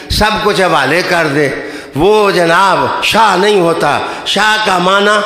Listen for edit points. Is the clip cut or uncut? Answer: cut